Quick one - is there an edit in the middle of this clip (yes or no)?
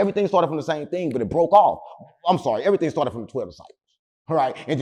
no